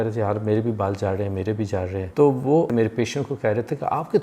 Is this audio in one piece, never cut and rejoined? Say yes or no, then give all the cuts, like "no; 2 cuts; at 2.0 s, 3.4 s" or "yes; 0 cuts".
no; 2 cuts; at 2.0 s, 2.7 s